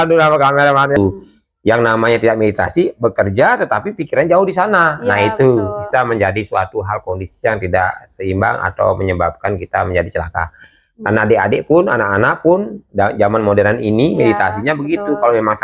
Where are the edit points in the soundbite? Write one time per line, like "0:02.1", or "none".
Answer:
0:01.0

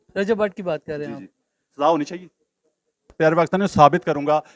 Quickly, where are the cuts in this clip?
0:03.1

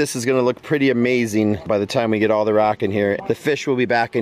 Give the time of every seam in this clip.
0:01.7
0:03.2

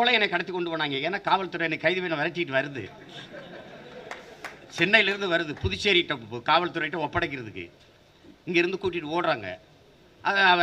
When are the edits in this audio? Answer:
none

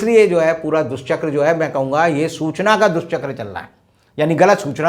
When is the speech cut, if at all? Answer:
none

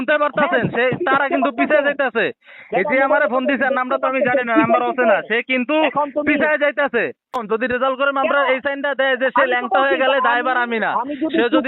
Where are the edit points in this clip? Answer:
0:07.4

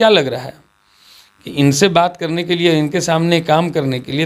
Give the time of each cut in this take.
none

